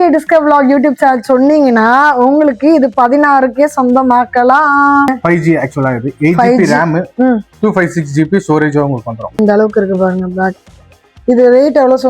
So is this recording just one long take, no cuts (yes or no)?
no